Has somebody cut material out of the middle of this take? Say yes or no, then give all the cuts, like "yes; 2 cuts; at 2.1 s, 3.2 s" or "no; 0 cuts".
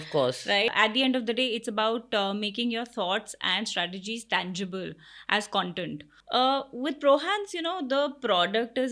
yes; 2 cuts; at 0.7 s, 6.1 s